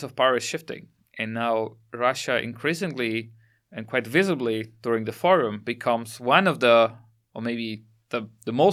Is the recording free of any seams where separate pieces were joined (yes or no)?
yes